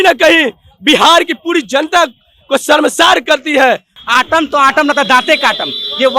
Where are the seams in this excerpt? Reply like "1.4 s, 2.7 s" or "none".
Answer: 3.9 s